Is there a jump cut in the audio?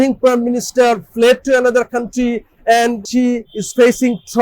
yes; 1 cut; at 3.1 s

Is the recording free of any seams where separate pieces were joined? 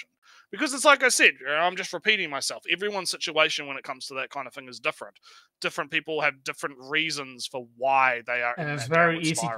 yes; 0 cuts

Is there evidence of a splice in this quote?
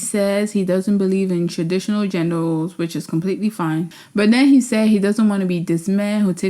yes; 1 cut; at 3.9 s

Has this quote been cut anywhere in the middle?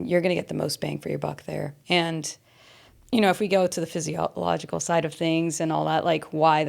yes; 1 cut; at 1.8 s

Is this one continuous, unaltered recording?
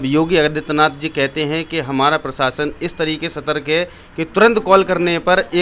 yes; 0 cuts

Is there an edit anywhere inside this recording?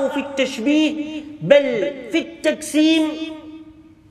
no; 0 cuts

